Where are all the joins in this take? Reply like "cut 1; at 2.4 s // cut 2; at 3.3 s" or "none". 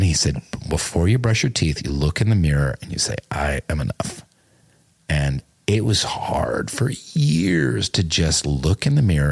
none